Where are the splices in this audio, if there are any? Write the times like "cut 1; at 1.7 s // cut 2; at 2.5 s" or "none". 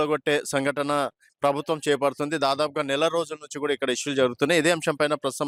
none

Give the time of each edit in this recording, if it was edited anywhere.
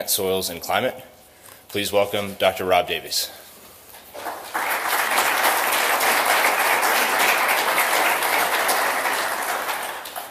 cut 1; at 6.6 s

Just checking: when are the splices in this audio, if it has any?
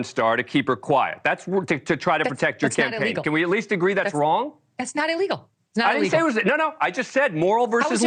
none

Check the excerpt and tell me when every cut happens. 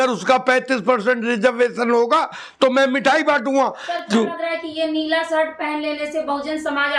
none

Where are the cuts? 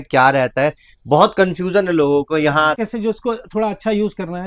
cut 1; at 2.8 s

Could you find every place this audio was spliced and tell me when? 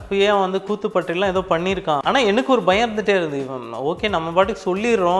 cut 1; at 2.0 s

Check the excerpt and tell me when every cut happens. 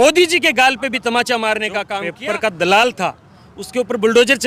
cut 1; at 2.0 s

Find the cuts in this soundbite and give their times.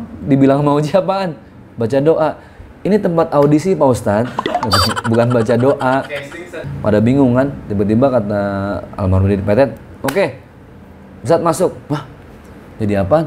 cut 1; at 6.6 s

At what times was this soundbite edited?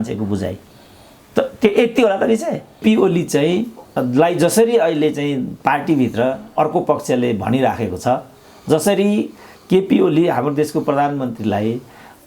cut 1; at 2.8 s

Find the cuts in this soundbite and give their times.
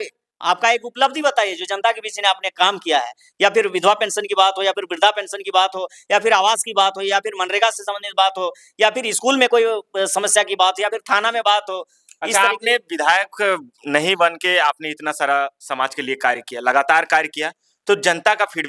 none

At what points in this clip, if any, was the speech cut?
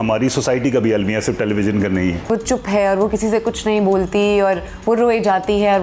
cut 1; at 2.3 s

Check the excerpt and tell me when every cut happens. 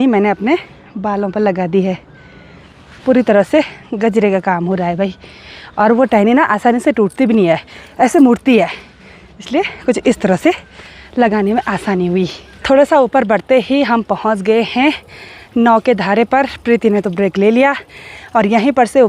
none

